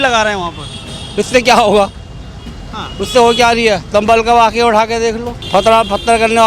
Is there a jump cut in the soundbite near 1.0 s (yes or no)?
no